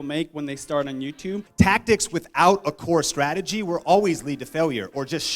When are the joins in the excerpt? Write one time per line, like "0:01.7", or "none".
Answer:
0:01.5